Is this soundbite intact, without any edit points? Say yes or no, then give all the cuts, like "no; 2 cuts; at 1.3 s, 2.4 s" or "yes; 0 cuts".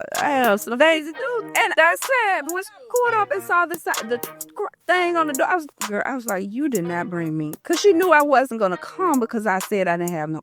no; 1 cut; at 1.1 s